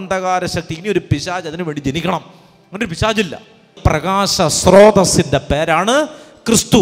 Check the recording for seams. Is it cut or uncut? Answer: cut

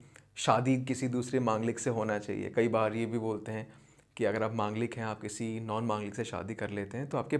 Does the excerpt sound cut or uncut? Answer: uncut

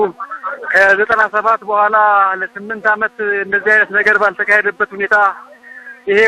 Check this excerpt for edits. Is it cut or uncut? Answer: uncut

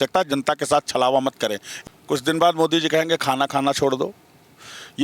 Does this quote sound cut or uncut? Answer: cut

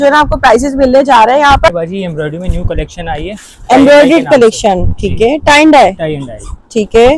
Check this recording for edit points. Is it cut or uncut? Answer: cut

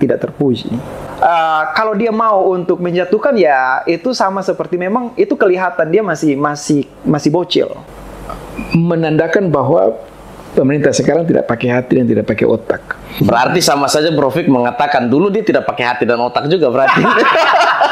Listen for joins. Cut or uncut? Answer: cut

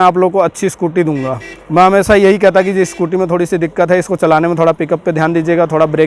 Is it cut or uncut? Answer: uncut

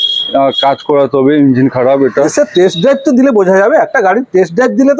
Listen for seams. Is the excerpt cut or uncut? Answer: uncut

